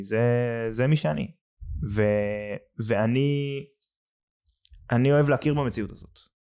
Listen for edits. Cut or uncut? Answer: uncut